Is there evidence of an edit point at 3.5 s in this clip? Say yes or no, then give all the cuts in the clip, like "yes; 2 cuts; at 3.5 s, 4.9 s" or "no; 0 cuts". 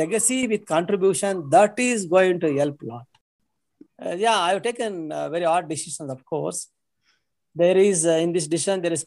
yes; 1 cut; at 3.5 s